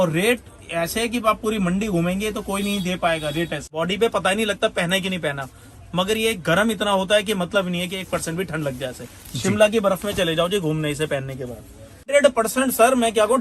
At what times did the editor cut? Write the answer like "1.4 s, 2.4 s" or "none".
3.7 s, 12.1 s